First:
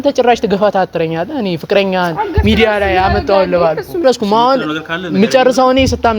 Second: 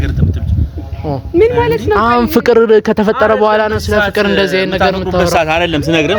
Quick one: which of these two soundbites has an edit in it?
first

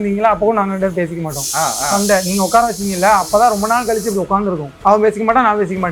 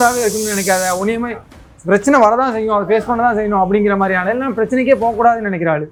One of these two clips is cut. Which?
first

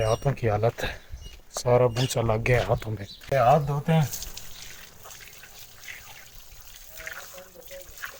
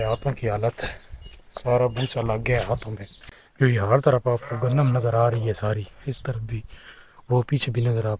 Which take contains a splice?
second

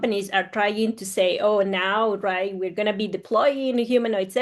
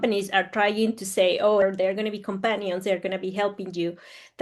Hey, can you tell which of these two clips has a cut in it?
second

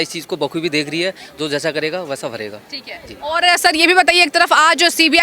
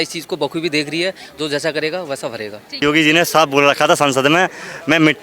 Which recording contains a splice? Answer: second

